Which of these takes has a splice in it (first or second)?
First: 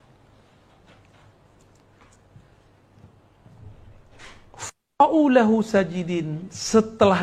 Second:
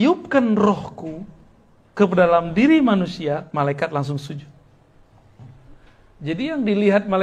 second